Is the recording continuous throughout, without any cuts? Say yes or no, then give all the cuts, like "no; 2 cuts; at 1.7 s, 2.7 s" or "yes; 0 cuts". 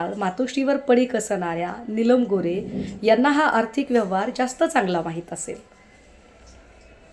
yes; 0 cuts